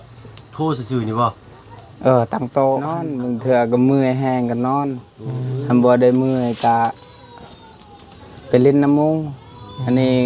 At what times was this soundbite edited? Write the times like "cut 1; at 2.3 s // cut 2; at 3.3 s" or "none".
cut 1; at 3.1 s